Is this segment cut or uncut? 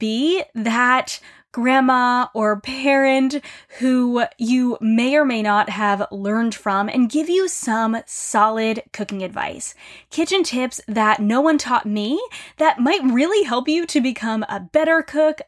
uncut